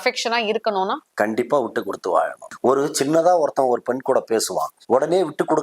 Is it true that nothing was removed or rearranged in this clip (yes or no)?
no